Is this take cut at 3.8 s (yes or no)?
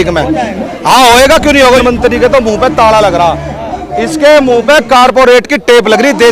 no